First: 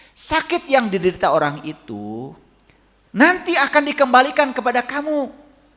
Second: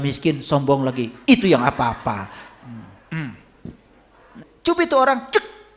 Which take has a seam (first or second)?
second